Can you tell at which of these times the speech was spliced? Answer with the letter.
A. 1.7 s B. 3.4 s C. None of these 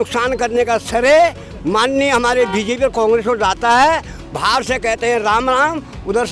C